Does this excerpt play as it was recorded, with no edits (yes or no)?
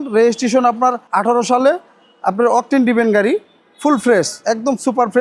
no